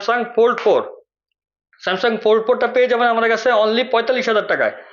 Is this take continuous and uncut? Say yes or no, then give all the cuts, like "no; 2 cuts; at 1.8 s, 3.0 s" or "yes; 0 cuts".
yes; 0 cuts